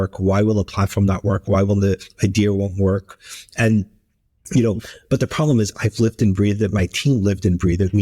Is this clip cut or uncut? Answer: uncut